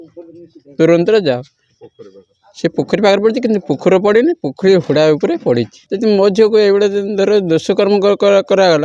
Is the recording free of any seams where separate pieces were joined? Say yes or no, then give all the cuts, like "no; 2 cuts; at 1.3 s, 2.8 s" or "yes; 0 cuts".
no; 1 cut; at 5.8 s